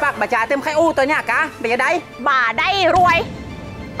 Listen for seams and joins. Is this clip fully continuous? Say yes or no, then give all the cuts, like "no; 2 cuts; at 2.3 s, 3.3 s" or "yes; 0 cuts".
yes; 0 cuts